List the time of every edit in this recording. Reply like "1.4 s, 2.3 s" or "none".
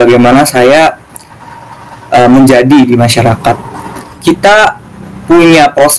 4.0 s